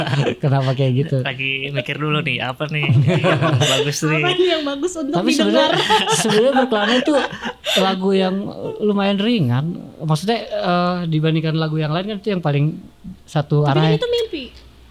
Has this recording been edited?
no; 0 cuts

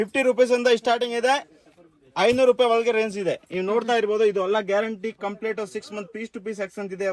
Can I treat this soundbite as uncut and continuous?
yes; 0 cuts

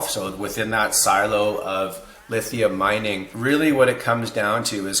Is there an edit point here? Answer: yes; 1 cut; at 3.3 s

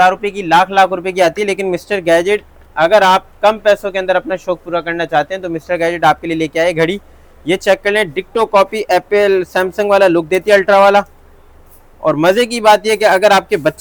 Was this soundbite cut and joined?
no; 0 cuts

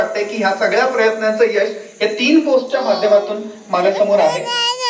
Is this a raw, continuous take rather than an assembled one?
yes; 0 cuts

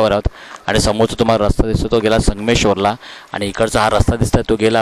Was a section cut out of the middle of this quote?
no; 0 cuts

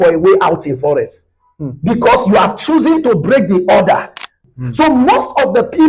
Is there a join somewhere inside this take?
yes; 1 cut; at 4.4 s

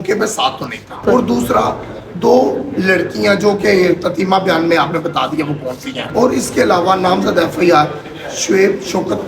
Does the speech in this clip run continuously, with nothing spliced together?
no; 2 cuts; at 1.0 s, 6.0 s

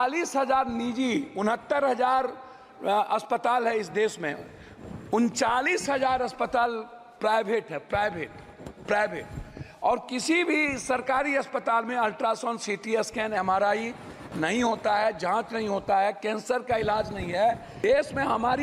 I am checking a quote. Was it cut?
yes; 1 cut; at 17.7 s

